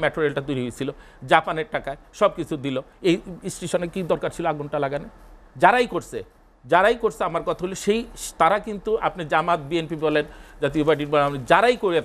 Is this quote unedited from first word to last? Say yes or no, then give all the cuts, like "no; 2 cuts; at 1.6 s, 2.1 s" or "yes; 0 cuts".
yes; 0 cuts